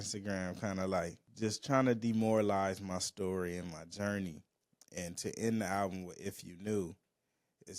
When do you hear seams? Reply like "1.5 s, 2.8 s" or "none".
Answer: 1.2 s